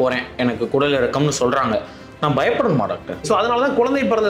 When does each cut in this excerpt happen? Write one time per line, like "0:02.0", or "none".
0:03.2

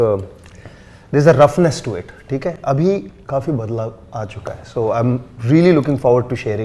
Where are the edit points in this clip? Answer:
none

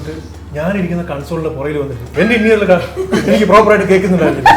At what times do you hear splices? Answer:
0:02.0

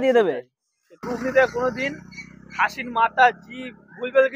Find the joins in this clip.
0:01.1

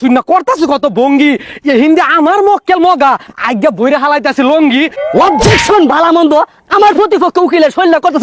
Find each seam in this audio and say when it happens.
0:05.0

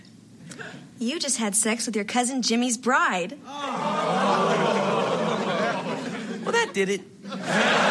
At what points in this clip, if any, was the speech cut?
none

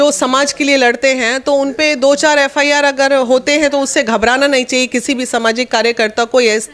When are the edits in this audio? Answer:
none

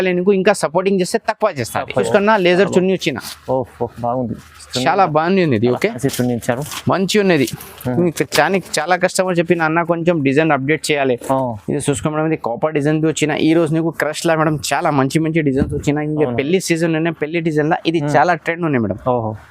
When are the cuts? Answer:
0:02.1
0:11.6

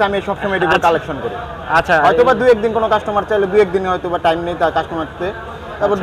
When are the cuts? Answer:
none

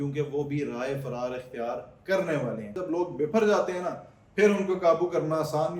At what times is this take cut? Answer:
0:02.8

